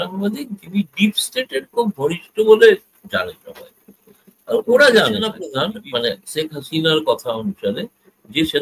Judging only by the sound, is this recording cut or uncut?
cut